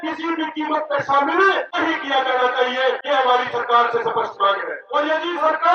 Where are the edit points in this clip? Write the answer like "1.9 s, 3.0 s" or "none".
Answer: 1.7 s, 3.0 s, 4.7 s